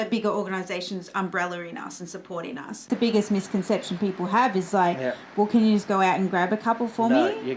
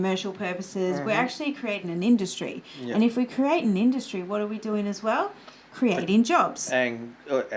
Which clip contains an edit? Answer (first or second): first